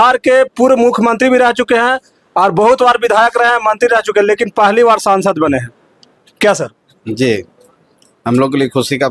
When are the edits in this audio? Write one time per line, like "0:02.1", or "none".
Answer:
none